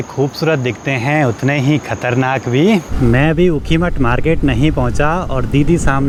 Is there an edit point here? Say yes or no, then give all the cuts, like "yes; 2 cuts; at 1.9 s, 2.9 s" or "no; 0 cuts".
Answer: no; 0 cuts